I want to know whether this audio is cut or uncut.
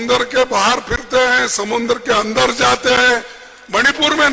uncut